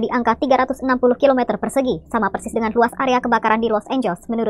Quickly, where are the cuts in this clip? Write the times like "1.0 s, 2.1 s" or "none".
none